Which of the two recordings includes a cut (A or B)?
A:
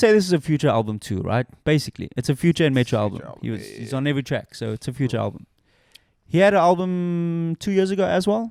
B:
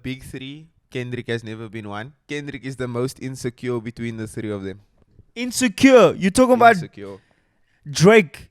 B